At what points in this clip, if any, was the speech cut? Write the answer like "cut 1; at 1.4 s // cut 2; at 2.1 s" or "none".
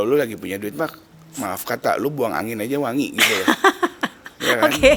none